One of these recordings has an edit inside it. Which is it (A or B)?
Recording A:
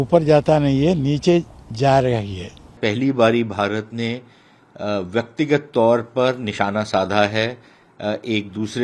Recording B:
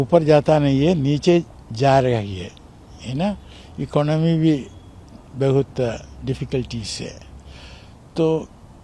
A